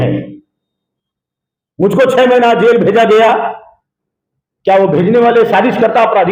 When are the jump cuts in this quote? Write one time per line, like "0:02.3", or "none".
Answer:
none